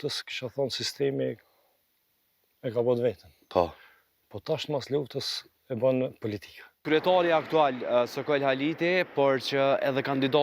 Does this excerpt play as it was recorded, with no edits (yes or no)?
no